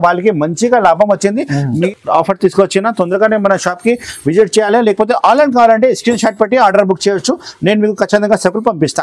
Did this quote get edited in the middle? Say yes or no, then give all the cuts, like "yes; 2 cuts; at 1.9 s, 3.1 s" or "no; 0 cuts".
yes; 1 cut; at 1.8 s